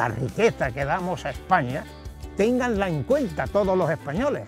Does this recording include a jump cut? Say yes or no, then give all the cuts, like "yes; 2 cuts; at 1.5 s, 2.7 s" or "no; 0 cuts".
no; 0 cuts